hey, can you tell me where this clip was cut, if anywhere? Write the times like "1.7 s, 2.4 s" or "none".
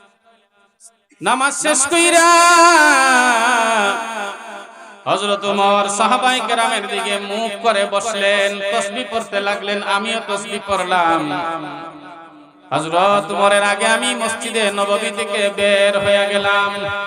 1.0 s